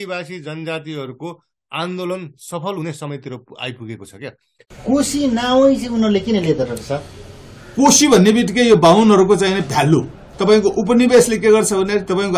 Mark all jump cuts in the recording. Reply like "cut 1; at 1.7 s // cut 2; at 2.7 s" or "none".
cut 1; at 4.7 s